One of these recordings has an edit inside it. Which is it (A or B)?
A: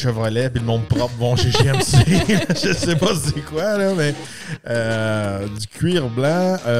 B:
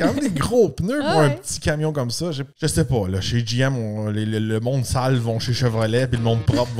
B